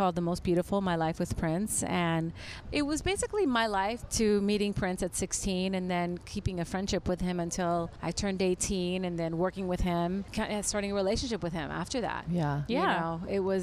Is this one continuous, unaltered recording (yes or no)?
no